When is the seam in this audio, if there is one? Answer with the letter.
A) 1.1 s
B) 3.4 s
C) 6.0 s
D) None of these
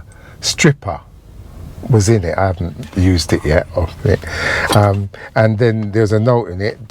D